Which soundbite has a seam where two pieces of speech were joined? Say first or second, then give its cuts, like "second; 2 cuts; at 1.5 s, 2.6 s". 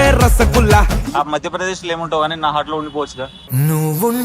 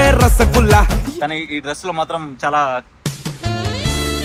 first; 1 cut; at 1.1 s